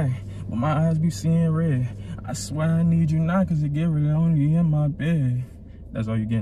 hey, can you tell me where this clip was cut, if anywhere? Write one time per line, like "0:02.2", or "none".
none